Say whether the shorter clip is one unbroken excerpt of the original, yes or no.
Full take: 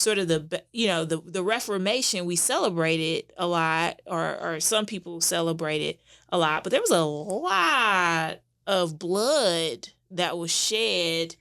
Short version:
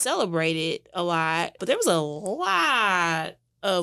no